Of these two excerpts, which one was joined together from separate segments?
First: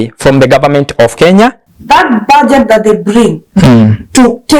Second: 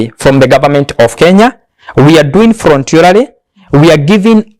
first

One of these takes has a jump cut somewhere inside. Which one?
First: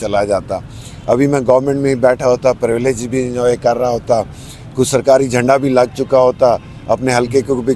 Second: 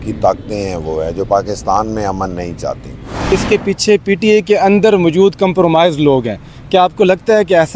second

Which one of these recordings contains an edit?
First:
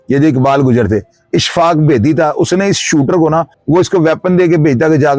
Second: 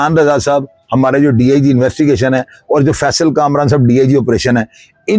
first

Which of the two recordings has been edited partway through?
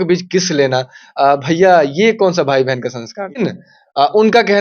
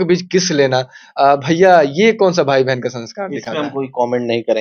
first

